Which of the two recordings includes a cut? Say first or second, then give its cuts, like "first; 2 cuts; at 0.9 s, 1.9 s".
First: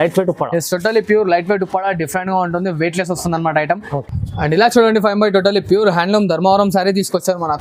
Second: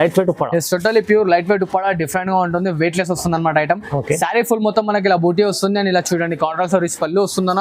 first; 1 cut; at 3.9 s